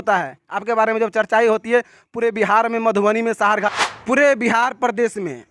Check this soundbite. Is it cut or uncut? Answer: cut